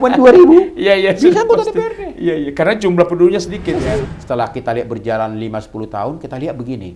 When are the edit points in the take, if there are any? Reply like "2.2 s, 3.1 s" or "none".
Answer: 4.1 s